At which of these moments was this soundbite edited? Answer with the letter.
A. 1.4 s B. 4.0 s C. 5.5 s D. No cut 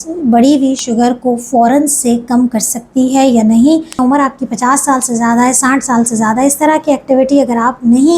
B